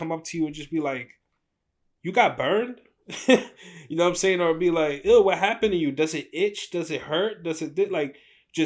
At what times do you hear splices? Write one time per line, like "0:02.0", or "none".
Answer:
none